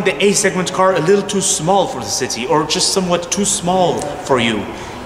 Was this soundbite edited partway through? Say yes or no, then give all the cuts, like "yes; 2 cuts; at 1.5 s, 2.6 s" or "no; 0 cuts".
no; 0 cuts